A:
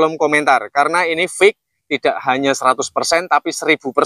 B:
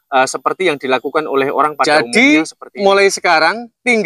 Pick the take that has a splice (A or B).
B